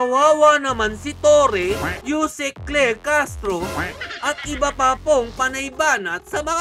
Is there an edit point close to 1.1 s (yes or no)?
no